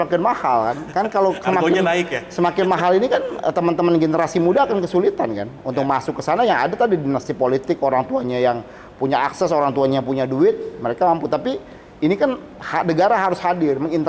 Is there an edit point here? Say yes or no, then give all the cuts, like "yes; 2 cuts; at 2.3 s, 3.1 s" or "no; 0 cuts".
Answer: no; 0 cuts